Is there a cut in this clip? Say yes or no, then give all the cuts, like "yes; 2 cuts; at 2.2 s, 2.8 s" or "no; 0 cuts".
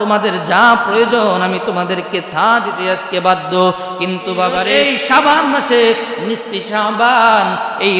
yes; 1 cut; at 4.7 s